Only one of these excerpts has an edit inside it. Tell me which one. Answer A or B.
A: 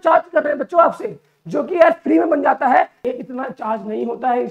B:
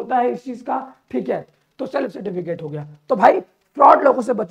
A